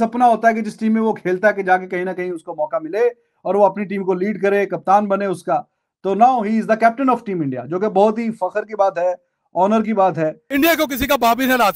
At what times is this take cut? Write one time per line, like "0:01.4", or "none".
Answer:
0:10.4